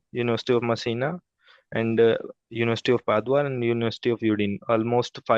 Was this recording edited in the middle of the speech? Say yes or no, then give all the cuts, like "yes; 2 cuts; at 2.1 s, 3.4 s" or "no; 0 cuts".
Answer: no; 0 cuts